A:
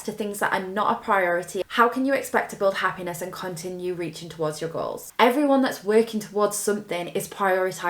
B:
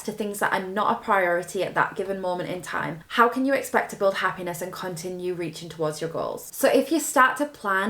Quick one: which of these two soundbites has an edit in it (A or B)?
A